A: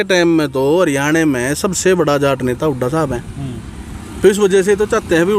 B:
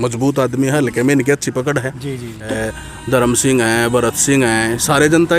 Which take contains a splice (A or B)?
B